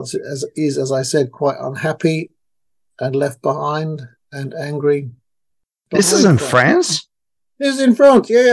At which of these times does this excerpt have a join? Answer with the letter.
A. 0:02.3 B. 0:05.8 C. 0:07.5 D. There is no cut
B